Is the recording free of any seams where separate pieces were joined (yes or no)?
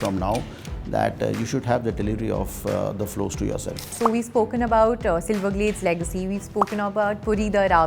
no